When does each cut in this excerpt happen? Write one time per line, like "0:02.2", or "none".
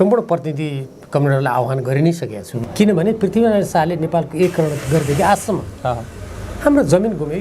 0:02.5